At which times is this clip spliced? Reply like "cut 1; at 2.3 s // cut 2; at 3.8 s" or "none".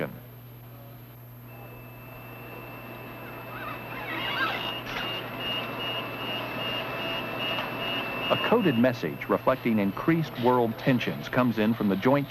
cut 1; at 4.4 s